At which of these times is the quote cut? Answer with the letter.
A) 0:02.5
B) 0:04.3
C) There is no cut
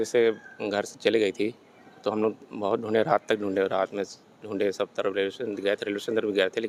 C